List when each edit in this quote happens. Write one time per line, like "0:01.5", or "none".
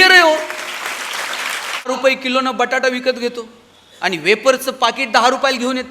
0:01.9